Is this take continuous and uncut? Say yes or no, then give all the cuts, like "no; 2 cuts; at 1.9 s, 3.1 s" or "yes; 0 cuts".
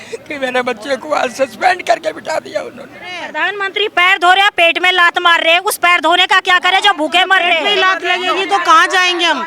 no; 1 cut; at 3.3 s